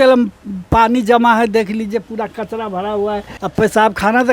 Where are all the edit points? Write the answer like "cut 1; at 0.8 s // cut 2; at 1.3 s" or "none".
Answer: cut 1; at 3.3 s